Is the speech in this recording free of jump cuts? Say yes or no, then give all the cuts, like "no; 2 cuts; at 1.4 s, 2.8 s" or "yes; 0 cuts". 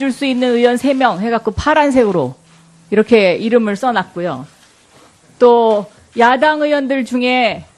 yes; 0 cuts